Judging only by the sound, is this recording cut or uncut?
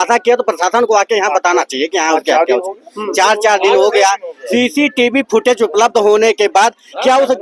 uncut